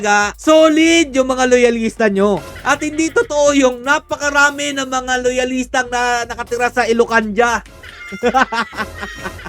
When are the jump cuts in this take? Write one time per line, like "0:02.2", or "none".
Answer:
none